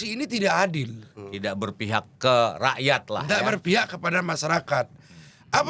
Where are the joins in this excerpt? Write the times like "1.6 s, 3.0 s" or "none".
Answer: none